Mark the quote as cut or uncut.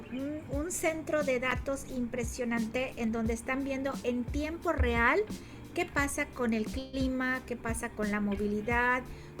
uncut